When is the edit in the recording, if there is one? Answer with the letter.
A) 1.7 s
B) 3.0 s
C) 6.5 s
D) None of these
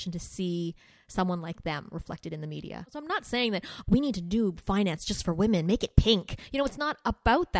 B